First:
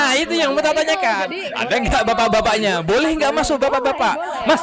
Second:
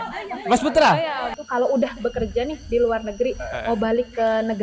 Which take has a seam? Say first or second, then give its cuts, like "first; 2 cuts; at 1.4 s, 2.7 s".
second; 1 cut; at 1.3 s